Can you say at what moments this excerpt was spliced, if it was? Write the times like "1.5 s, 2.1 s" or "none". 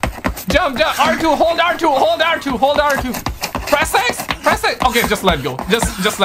none